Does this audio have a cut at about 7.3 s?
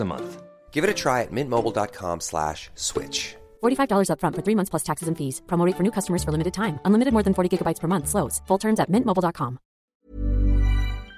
no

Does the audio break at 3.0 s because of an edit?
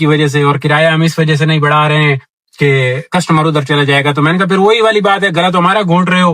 no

